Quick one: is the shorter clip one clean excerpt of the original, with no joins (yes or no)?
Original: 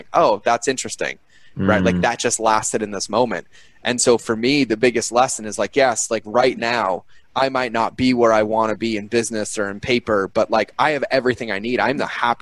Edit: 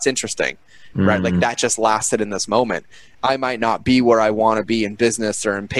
no